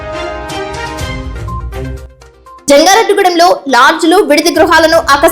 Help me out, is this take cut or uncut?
uncut